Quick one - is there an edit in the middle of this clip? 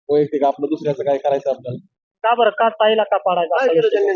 no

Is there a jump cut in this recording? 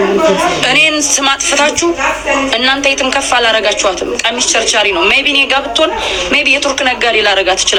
no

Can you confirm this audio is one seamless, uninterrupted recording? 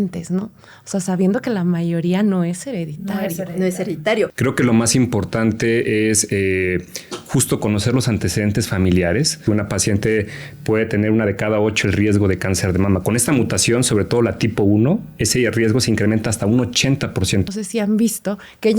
no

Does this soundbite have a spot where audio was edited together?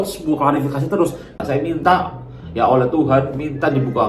yes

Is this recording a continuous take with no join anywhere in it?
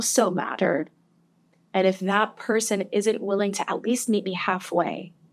yes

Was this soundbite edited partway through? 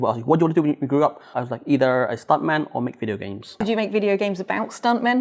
yes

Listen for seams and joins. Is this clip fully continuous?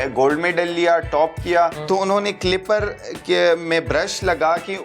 no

